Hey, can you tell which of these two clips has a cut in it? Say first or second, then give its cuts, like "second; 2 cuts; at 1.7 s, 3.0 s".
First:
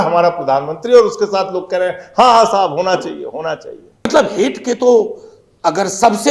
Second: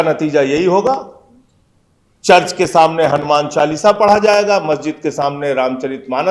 first; 1 cut; at 4.1 s